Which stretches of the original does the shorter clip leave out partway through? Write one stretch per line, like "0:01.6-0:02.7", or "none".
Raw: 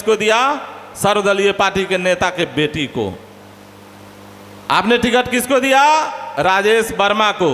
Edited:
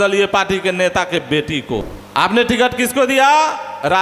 0:03.2-0:04.5